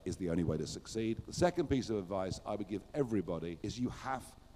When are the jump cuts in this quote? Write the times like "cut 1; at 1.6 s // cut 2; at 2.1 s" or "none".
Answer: cut 1; at 1.3 s